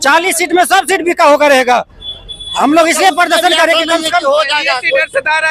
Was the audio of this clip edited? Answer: no; 0 cuts

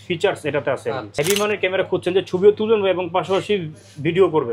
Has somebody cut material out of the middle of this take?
yes; 1 cut; at 1.1 s

